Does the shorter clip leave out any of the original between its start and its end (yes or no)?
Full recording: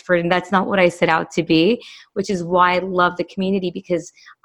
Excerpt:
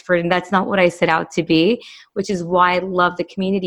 no